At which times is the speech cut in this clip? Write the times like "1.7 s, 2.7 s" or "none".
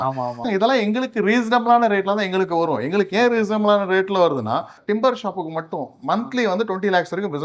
4.8 s